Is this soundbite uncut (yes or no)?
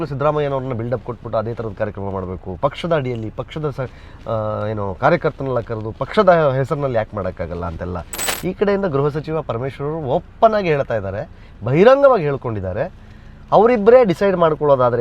no